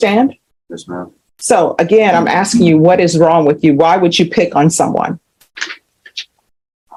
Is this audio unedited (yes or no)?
yes